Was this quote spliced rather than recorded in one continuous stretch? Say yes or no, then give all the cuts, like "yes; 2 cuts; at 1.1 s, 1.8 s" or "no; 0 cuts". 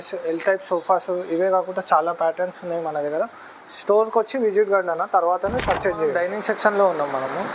no; 0 cuts